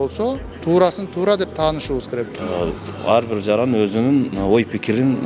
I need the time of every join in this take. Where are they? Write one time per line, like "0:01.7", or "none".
0:02.3

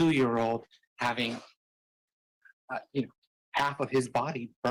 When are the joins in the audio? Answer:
none

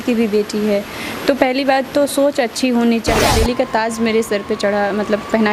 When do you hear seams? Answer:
0:03.2

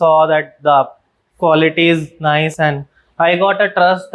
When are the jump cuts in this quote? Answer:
none

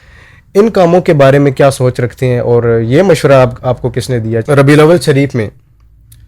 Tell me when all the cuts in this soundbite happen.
0:04.4

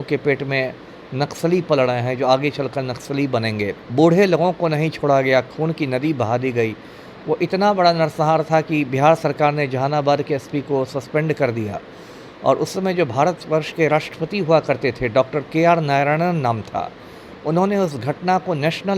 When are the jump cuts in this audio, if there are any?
none

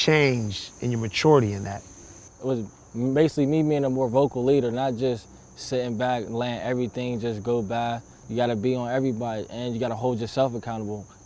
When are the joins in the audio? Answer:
0:02.3
0:08.1

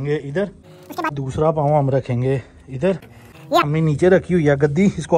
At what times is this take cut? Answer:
0:01.1
0:03.7

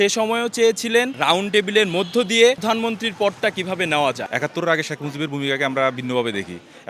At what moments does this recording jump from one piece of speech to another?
0:01.1
0:02.6
0:04.3

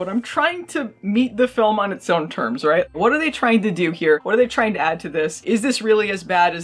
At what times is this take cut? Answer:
none

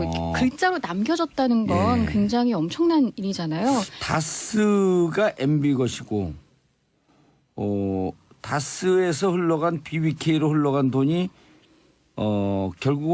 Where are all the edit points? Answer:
none

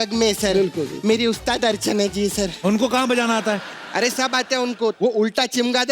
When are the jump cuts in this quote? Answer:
0:00.9
0:02.5
0:04.9

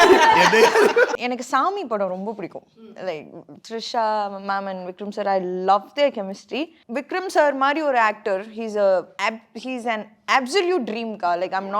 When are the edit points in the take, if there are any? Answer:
0:01.1
0:06.8
0:09.1

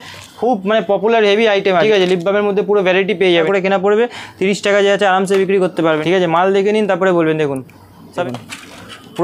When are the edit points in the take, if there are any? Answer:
0:01.8
0:03.3
0:06.0
0:08.2

